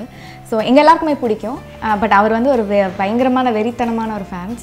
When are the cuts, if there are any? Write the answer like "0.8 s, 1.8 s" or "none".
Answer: none